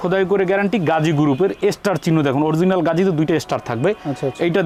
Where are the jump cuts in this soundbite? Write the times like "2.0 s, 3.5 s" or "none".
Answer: none